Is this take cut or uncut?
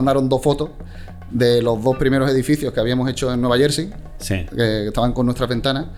uncut